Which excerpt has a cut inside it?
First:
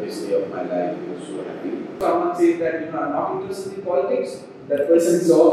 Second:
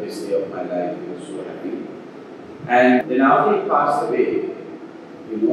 first; 1 cut; at 2.0 s

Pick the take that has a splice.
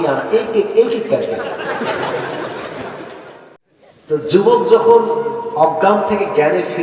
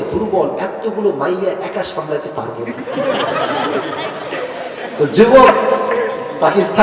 first; 1 cut; at 3.6 s

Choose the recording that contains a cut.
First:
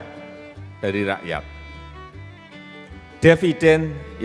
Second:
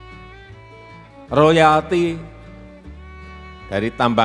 first; 2 cuts; at 1.7 s, 3.0 s

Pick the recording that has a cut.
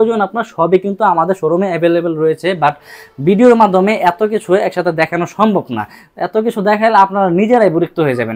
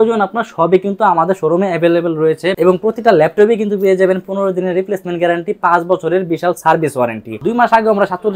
second; 2 cuts; at 2.5 s, 7.4 s

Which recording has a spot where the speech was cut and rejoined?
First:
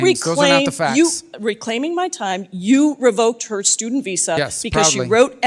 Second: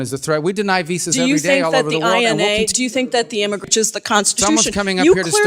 second; 1 cut; at 3.7 s

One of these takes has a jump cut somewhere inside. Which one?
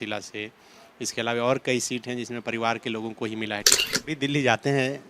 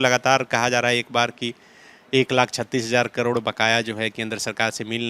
first; 1 cut; at 3.8 s

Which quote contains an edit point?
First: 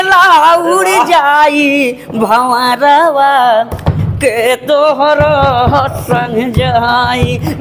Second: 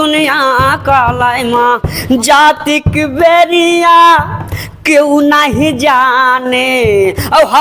second; 1 cut; at 1.9 s

